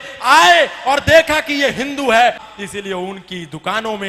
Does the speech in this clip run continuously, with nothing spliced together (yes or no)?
no